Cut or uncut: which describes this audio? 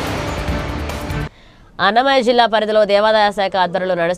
cut